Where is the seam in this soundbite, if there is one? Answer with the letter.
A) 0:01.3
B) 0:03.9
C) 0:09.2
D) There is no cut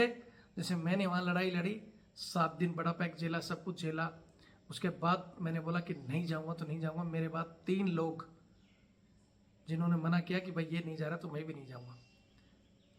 D